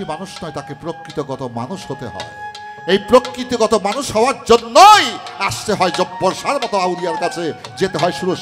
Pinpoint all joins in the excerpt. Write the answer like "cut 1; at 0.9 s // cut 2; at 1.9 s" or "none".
none